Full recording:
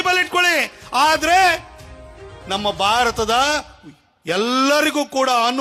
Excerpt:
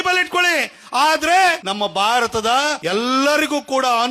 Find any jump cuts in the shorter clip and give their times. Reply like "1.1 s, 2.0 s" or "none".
1.6 s, 2.8 s